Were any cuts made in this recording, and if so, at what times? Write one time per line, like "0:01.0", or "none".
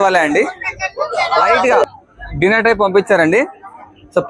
0:01.7